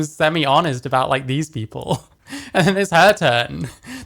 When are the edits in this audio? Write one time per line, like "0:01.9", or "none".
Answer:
none